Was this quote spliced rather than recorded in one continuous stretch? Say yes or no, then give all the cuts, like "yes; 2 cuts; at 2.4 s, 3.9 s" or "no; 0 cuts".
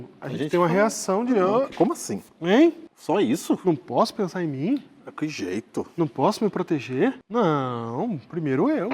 yes; 2 cuts; at 2.9 s, 7.2 s